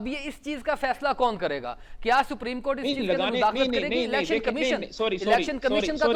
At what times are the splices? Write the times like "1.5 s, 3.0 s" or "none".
none

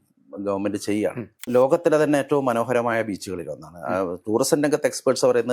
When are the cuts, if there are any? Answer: 1.5 s

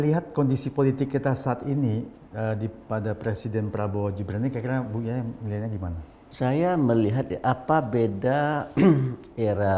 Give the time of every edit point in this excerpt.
none

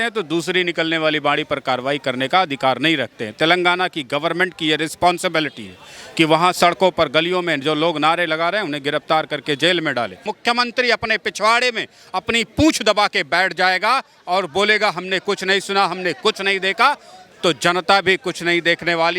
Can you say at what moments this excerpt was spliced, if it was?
10.3 s

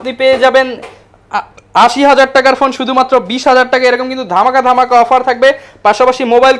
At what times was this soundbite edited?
none

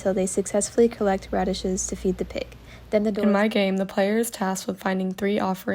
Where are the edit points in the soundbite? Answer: 3.1 s

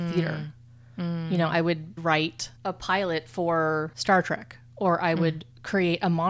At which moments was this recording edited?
2.0 s, 3.9 s

